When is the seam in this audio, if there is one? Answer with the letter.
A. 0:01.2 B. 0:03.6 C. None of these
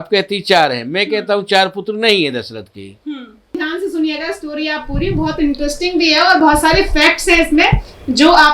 B